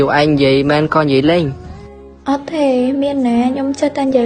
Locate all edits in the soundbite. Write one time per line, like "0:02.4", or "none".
none